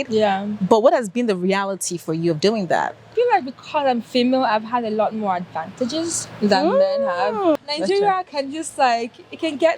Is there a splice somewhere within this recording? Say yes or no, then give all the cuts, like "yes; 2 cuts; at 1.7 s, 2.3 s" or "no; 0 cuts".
yes; 2 cuts; at 3.1 s, 7.5 s